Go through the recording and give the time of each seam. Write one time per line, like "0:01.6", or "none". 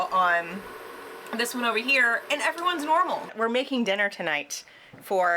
0:03.3